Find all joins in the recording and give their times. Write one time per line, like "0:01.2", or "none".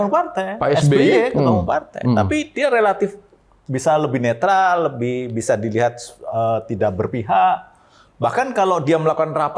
none